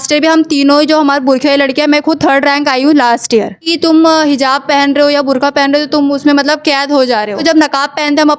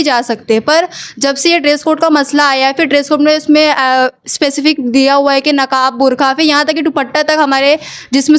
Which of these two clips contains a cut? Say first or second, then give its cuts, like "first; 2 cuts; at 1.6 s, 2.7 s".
first; 2 cuts; at 3.7 s, 7.4 s